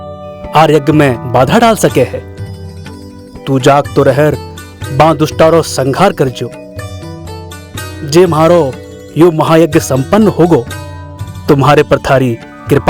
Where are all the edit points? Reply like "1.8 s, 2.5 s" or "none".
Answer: none